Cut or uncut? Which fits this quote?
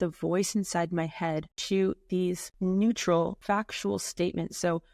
cut